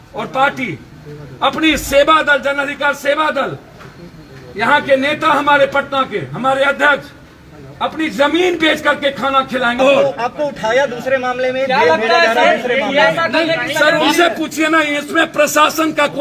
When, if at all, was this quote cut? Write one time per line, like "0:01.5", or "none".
0:09.8